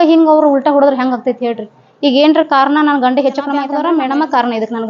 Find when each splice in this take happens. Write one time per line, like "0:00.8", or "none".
0:03.7